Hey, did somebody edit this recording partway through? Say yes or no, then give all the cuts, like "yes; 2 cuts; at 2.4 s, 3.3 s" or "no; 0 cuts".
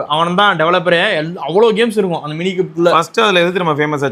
no; 0 cuts